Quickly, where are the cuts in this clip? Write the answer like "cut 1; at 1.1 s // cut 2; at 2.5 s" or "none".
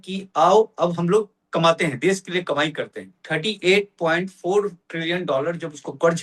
cut 1; at 3.2 s